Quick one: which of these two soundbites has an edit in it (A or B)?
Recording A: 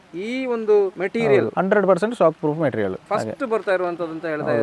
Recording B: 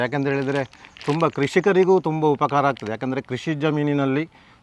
A